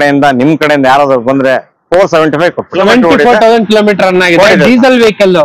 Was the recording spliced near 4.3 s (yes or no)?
no